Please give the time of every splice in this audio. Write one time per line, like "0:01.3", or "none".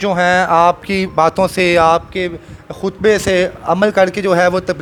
none